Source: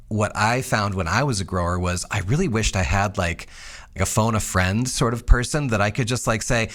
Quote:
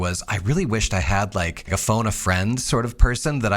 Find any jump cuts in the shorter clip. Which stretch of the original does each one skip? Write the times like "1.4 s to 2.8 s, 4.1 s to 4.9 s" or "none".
3.4 s to 3.9 s